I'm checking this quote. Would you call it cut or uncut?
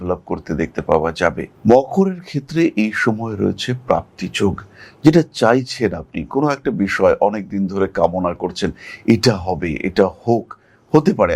uncut